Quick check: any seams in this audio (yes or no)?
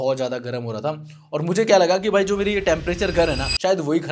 no